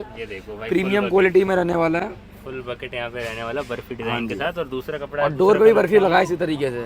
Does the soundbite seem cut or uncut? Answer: uncut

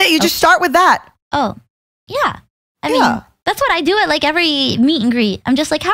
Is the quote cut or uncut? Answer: cut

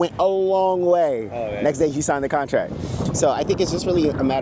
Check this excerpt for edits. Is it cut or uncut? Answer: uncut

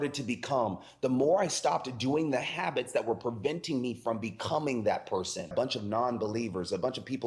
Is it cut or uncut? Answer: cut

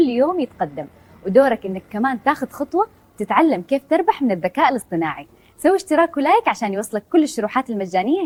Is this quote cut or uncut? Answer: uncut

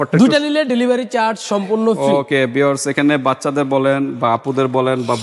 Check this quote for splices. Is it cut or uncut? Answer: uncut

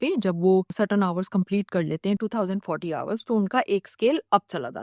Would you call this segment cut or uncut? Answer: uncut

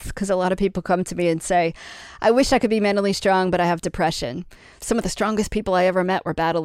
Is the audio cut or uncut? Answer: uncut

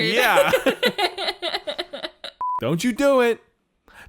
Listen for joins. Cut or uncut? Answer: cut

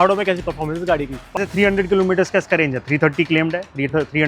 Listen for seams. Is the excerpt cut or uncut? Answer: cut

